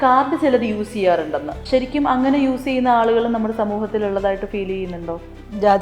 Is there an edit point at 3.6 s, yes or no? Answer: no